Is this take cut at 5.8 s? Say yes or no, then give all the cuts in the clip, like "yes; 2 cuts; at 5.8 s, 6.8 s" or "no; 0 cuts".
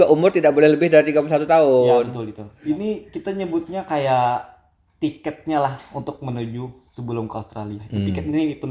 no; 1 cut; at 2.4 s